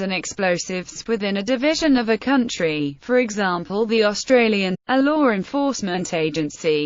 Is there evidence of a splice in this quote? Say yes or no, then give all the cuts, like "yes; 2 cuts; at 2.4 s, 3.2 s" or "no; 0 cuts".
no; 0 cuts